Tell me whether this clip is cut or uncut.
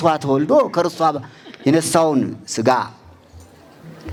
uncut